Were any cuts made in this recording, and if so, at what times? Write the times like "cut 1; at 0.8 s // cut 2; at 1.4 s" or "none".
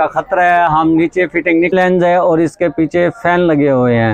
cut 1; at 1.7 s